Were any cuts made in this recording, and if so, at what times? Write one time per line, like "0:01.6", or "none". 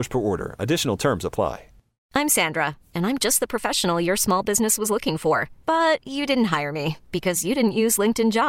0:02.0